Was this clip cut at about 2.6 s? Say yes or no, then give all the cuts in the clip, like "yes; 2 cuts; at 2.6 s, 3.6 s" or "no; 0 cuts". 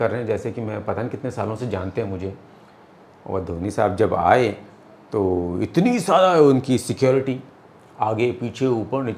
no; 0 cuts